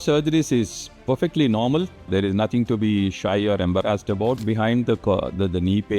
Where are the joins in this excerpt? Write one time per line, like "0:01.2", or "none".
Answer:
0:02.1
0:04.4